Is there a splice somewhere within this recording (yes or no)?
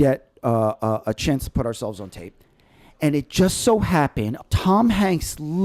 yes